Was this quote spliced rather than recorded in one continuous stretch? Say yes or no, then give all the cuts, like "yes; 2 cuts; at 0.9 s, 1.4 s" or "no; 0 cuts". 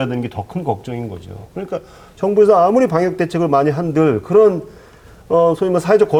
no; 0 cuts